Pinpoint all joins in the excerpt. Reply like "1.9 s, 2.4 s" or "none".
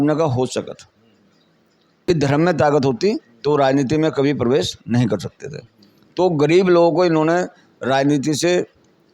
2.1 s